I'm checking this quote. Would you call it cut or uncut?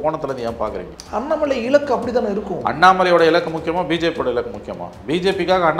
cut